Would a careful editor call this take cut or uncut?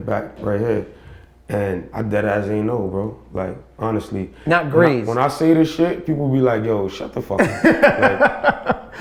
uncut